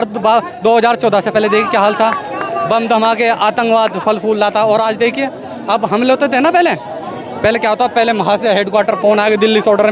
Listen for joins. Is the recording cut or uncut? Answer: uncut